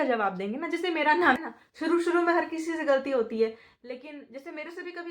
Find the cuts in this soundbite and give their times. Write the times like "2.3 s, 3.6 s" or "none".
1.4 s